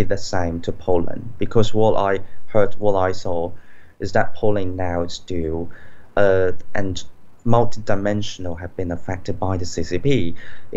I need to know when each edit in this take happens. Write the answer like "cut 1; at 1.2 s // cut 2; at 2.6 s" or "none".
none

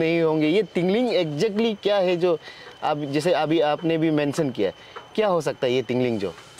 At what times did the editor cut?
none

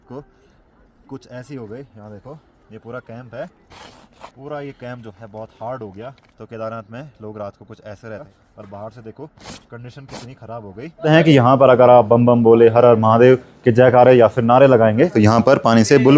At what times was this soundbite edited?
cut 1; at 4.1 s // cut 2; at 6.3 s // cut 3; at 8.2 s // cut 4; at 11.1 s

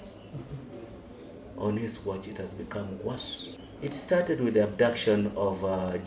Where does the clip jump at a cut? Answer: cut 1; at 3.6 s

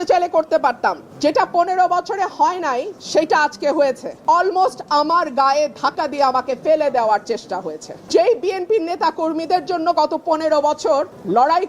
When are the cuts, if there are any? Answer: cut 1; at 1.0 s

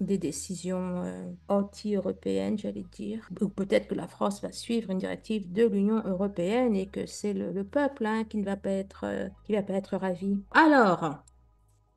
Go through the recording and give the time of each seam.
cut 1; at 10.5 s

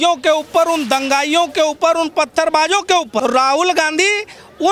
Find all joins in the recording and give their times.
cut 1; at 3.2 s

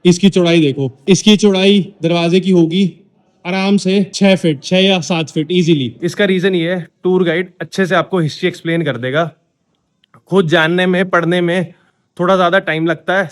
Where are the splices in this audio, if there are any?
cut 1; at 0.9 s // cut 2; at 4.1 s // cut 3; at 6.0 s

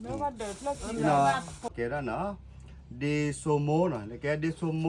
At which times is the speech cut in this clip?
cut 1; at 1.7 s

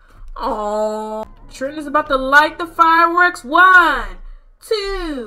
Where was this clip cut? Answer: cut 1; at 1.2 s

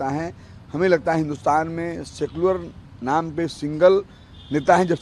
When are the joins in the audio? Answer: none

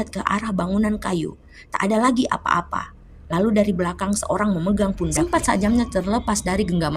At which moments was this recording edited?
cut 1; at 5.1 s

